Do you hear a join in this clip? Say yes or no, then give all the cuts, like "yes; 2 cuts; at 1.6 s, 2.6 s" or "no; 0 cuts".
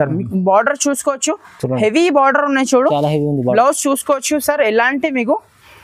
no; 0 cuts